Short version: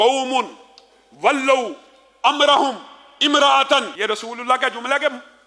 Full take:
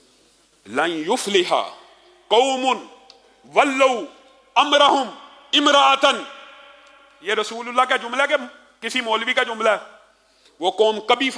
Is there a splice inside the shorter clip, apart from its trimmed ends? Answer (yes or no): yes